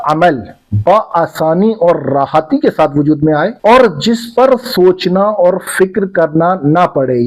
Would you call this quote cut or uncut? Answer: cut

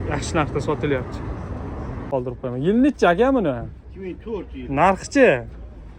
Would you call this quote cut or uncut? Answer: cut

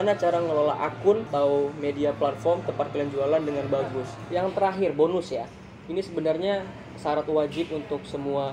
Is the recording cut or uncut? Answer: cut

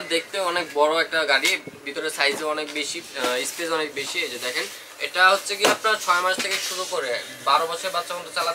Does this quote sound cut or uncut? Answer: uncut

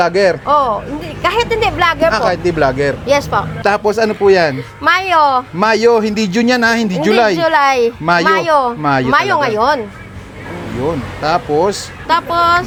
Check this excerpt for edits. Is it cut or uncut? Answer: uncut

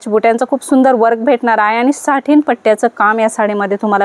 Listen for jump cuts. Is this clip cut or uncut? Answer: uncut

